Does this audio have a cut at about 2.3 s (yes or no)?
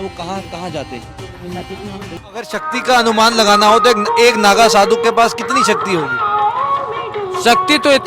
yes